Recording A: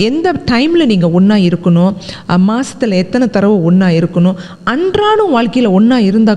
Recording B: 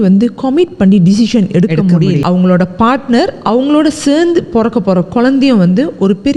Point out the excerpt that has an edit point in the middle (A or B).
B